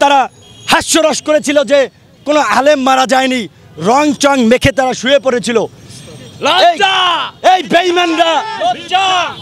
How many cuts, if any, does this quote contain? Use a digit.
0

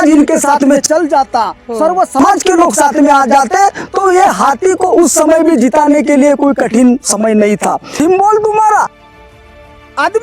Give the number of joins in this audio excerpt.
1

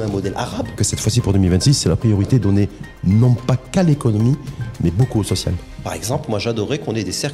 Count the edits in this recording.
2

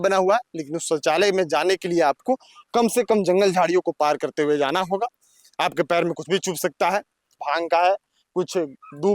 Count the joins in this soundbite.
1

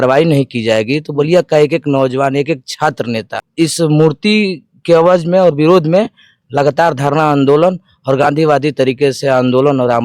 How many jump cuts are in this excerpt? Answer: 1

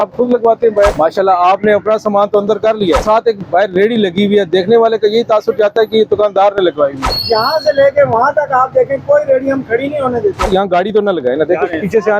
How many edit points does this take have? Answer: 4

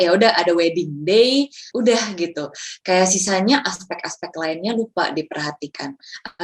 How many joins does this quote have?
1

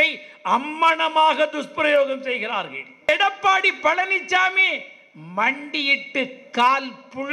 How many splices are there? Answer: 1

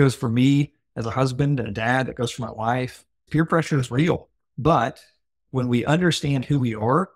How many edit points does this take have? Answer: 2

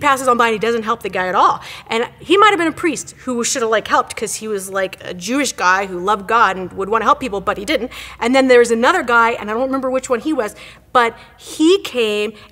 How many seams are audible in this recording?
2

